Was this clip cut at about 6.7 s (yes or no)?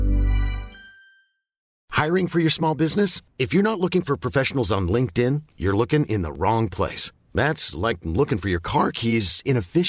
no